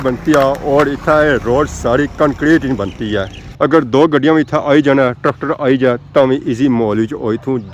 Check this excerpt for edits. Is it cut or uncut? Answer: cut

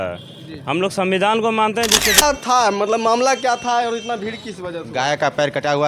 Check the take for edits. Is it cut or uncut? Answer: cut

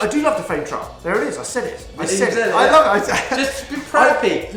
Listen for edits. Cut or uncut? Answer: uncut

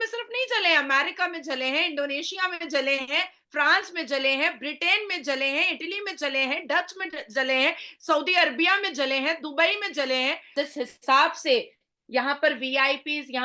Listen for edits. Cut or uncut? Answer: cut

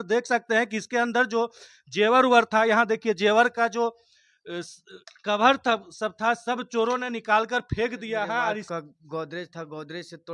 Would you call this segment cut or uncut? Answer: cut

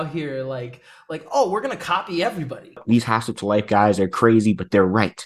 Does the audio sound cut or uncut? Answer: cut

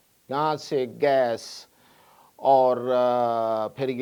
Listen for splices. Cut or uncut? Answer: uncut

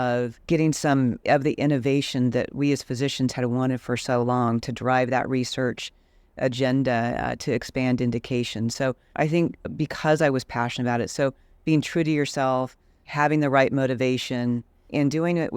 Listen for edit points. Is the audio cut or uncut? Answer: uncut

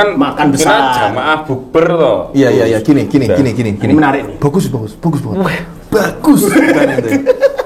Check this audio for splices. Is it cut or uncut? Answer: uncut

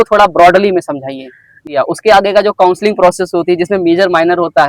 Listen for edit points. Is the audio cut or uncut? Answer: cut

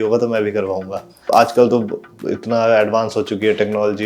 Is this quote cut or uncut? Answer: cut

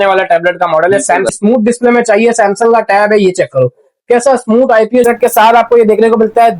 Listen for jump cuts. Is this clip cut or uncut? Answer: cut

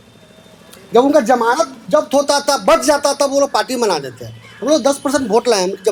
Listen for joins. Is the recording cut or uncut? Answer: uncut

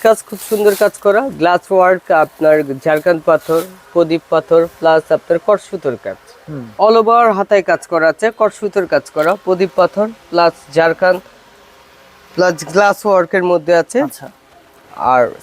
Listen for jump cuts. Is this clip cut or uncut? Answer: cut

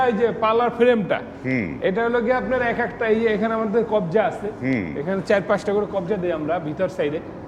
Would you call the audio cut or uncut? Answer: uncut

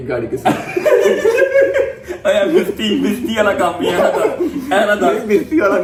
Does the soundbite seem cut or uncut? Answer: uncut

